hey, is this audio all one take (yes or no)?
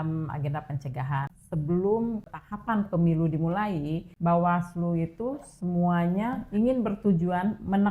no